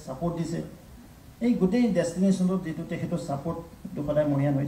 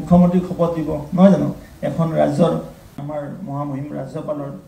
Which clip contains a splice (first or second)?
second